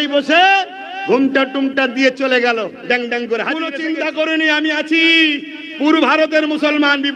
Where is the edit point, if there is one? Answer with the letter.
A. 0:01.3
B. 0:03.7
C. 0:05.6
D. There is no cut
B